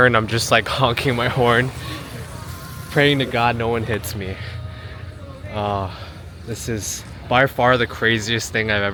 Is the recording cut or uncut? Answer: uncut